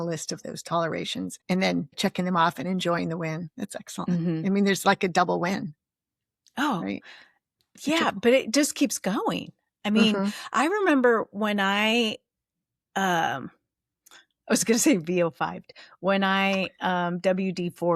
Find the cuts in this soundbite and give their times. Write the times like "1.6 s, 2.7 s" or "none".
1.4 s, 2.0 s